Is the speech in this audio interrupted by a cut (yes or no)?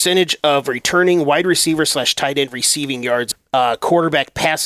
yes